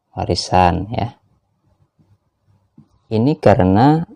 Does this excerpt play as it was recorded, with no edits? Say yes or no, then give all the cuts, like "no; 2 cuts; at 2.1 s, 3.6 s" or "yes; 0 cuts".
no; 1 cut; at 3.1 s